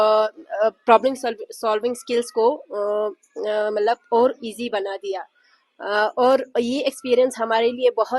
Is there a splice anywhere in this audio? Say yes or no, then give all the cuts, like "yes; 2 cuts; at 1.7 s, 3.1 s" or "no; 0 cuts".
no; 0 cuts